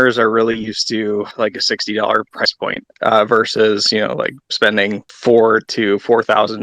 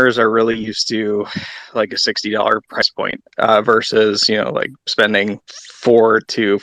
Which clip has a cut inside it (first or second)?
first